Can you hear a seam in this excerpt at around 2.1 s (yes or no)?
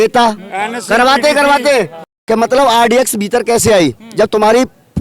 yes